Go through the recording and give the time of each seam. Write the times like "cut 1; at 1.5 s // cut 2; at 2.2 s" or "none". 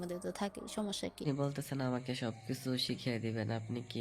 cut 1; at 1.2 s